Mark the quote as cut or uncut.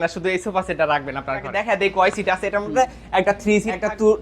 cut